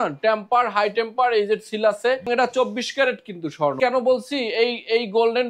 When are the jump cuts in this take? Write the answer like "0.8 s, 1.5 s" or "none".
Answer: 2.3 s, 3.8 s